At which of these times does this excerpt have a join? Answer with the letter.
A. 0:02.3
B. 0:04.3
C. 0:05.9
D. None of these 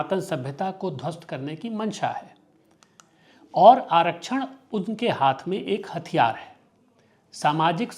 D